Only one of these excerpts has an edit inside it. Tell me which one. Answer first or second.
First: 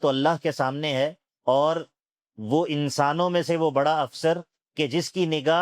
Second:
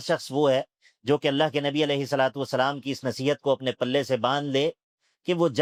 first